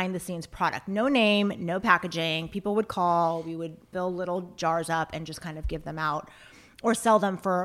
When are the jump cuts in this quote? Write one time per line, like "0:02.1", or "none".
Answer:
0:03.8
0:04.5